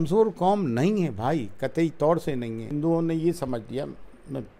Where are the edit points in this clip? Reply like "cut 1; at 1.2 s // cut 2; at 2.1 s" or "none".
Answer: cut 1; at 2.7 s

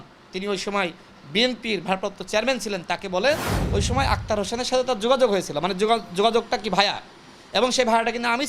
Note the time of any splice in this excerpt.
cut 1; at 3.6 s

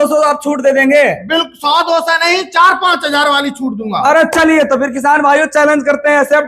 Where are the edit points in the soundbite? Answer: none

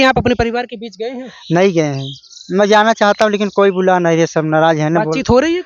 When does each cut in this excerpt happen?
none

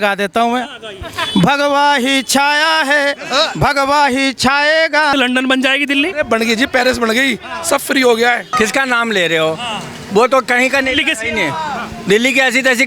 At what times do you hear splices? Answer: cut 1; at 5.1 s // cut 2; at 8.5 s

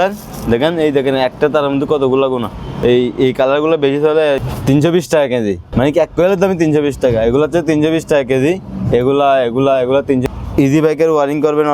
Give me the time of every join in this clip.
cut 1; at 4.5 s // cut 2; at 5.6 s // cut 3; at 10.2 s

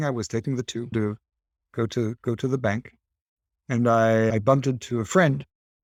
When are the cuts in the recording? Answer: none

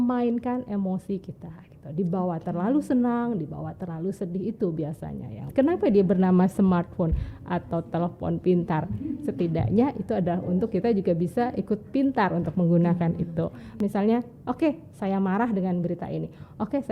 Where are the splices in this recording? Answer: cut 1; at 5.5 s // cut 2; at 13.8 s

